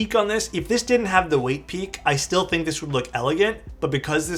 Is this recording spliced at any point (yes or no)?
no